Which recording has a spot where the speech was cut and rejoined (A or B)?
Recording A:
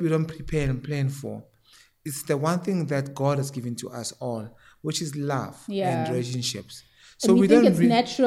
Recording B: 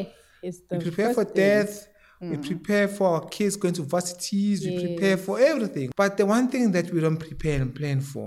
B